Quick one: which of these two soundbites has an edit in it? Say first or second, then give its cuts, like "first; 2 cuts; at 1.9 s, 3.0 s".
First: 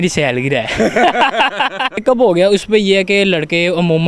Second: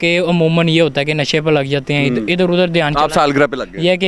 first; 1 cut; at 2.0 s